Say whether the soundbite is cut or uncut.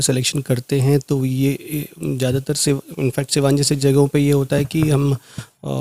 uncut